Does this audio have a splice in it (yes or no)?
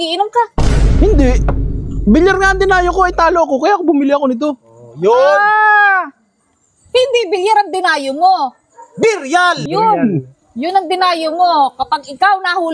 yes